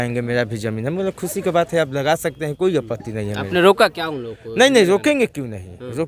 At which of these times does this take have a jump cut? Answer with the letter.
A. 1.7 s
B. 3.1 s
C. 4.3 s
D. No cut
D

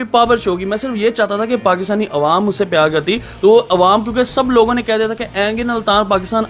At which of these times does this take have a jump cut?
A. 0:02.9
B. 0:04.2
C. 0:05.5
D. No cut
D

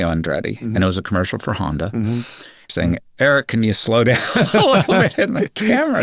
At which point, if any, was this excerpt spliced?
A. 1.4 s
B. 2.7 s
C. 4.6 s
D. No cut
B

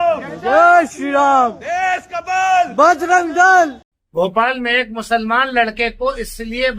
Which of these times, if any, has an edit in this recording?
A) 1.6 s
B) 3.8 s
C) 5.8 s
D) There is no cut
B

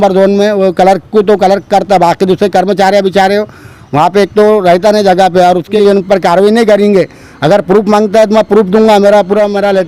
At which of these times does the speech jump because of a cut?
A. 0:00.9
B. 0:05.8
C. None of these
B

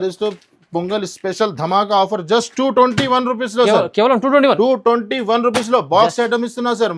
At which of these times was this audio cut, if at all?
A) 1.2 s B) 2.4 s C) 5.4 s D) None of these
D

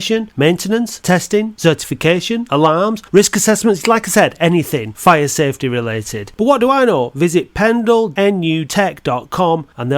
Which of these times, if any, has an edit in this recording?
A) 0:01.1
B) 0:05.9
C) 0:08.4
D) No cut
C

